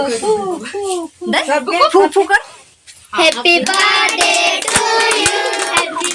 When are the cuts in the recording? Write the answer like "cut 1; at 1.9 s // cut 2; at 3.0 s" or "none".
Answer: none

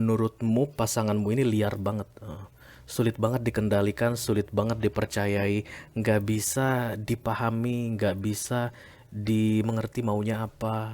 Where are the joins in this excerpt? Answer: none

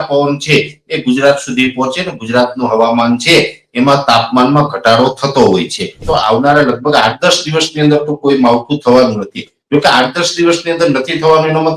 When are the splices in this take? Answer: cut 1; at 6.0 s

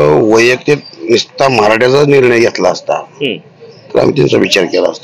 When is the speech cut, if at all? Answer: none

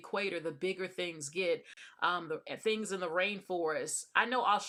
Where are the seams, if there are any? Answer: none

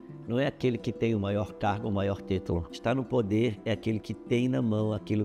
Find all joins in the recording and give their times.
cut 1; at 2.7 s

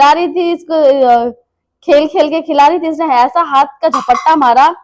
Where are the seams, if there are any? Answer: none

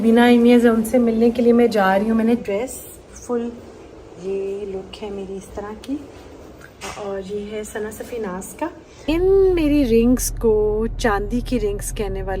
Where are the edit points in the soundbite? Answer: cut 1; at 2.4 s // cut 2; at 9.1 s

